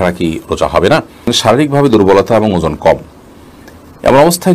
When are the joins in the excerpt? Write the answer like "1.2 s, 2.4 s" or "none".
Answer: 1.3 s